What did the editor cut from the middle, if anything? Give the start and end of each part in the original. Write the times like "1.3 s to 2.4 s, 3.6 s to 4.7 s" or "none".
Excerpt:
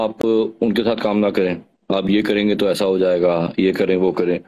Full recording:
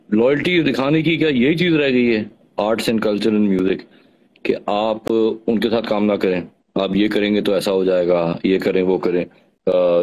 none